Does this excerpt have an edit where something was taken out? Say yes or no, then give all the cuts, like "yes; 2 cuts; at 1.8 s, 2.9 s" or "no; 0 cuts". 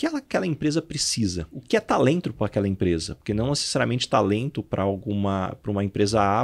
yes; 1 cut; at 1.6 s